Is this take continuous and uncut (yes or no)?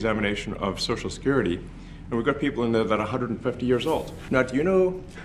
no